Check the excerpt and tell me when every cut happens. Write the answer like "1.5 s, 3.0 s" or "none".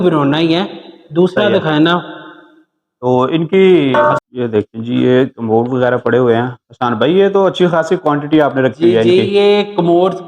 4.2 s